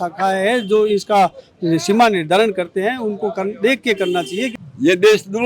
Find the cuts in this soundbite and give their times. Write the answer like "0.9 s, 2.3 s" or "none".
4.5 s